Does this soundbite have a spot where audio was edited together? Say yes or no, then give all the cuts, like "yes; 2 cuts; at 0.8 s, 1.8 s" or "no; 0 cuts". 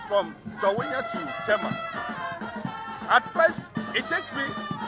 yes; 1 cut; at 3.7 s